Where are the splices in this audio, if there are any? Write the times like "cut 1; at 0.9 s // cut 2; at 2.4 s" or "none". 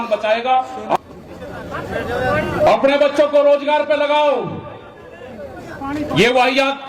none